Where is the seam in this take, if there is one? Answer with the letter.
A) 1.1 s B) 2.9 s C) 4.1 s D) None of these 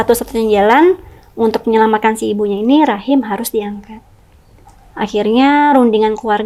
D